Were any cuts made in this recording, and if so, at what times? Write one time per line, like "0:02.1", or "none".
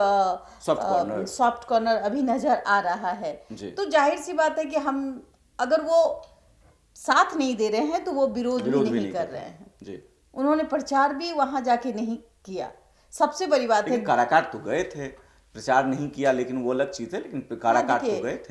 none